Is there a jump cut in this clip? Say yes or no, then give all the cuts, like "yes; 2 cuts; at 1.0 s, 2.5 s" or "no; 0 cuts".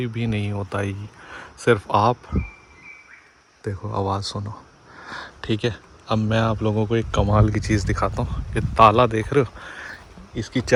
no; 0 cuts